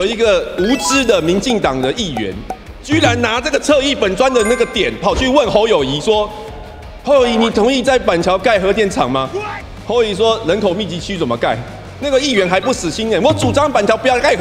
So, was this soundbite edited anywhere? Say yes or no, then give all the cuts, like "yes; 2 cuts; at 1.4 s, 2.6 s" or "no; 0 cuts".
no; 0 cuts